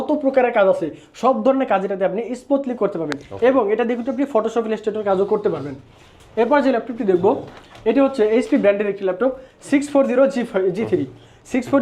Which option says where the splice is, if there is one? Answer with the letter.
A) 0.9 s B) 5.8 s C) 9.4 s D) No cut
D